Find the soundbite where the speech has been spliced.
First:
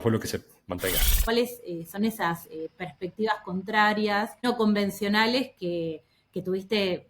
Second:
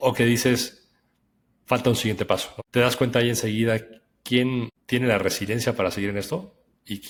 first; 2 cuts; at 1.2 s, 4.5 s

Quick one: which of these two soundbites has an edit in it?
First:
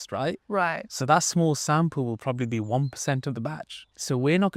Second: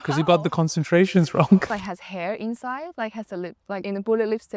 second; 1 cut; at 1.7 s

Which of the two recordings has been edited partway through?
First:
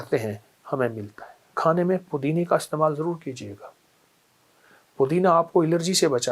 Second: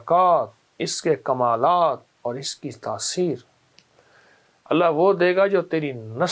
first; 1 cut; at 1.5 s

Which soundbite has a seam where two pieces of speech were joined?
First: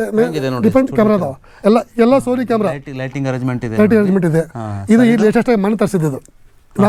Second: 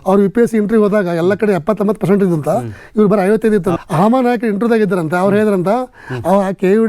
second; 1 cut; at 3.8 s

